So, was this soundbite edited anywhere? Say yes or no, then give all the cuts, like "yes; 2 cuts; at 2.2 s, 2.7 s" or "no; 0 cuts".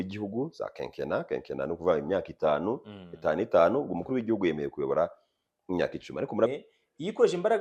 yes; 1 cut; at 6.5 s